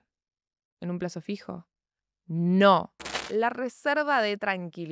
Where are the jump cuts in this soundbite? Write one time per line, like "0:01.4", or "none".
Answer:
0:03.2